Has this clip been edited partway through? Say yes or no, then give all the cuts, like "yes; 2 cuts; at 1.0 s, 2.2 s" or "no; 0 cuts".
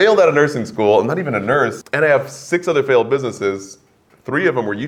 yes; 1 cut; at 1.8 s